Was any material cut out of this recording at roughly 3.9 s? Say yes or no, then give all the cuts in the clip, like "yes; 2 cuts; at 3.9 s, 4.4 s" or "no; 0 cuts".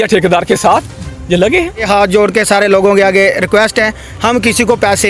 no; 1 cut; at 1.8 s